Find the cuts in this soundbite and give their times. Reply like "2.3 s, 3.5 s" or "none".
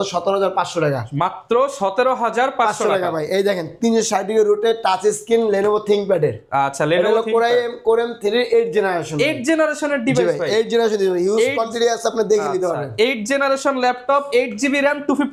none